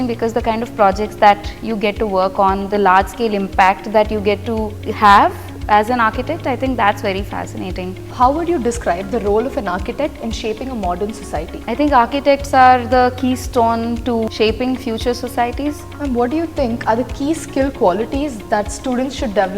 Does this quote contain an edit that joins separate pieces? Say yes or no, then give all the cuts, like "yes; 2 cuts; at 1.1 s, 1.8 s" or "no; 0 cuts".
yes; 5 cuts; at 4.8 s, 8.0 s, 11.5 s, 14.3 s, 15.9 s